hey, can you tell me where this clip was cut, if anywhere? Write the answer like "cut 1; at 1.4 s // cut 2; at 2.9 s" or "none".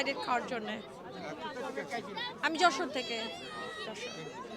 none